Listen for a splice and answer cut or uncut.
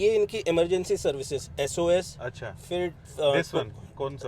uncut